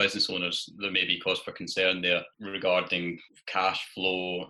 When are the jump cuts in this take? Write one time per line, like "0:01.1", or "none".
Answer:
0:02.4
0:03.3